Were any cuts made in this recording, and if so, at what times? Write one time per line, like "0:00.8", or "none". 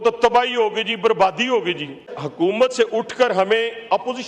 0:02.1